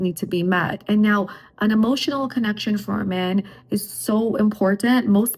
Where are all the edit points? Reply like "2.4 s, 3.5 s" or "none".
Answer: none